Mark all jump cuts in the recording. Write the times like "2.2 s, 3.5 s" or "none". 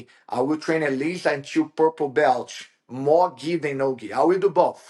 none

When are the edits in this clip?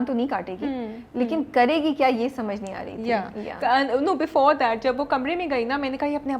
none

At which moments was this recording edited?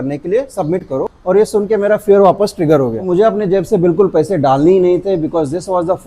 1.1 s, 3.1 s

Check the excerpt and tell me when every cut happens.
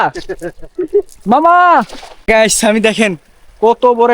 2.3 s

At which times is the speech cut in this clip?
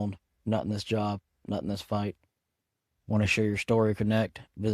none

